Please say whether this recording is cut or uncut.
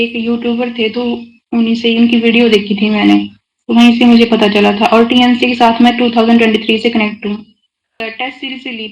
cut